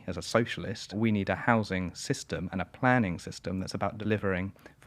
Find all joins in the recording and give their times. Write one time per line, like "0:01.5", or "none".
0:00.9
0:04.0